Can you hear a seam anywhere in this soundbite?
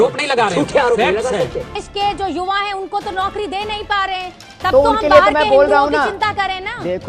yes; 1 cut; at 1.8 s

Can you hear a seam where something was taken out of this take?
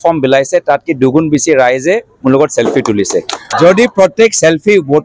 yes; 1 cut; at 3.5 s

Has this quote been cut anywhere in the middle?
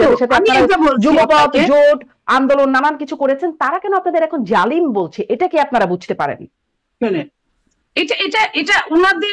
no; 0 cuts

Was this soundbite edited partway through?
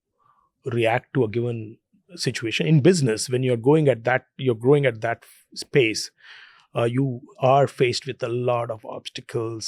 no; 0 cuts

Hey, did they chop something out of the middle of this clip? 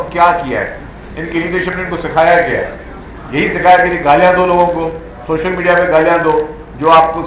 no; 0 cuts

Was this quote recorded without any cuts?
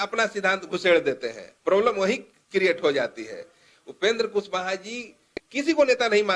yes; 0 cuts

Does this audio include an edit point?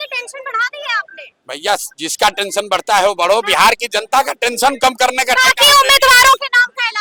no; 0 cuts

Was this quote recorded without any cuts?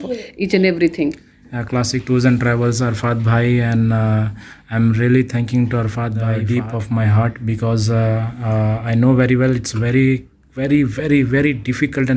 no; 1 cut; at 6.3 s

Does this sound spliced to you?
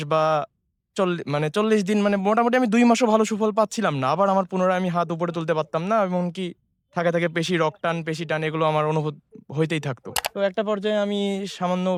no; 0 cuts

